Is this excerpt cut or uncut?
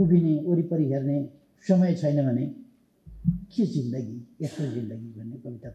cut